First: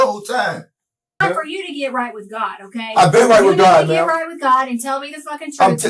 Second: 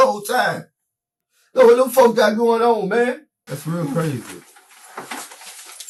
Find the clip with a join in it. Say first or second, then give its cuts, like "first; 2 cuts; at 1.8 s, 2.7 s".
first; 1 cut; at 1.2 s